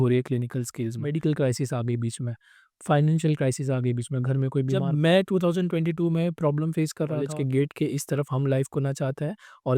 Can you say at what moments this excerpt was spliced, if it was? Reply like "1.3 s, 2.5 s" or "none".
1.0 s, 4.8 s, 7.3 s